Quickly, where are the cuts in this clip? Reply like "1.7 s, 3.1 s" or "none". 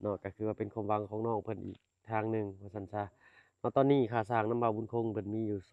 none